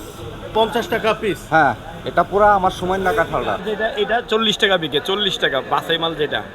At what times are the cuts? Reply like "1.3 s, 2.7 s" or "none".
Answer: 3.6 s